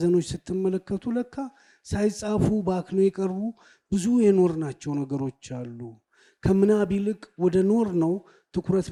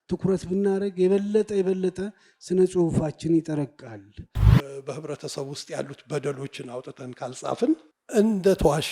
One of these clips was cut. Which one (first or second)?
second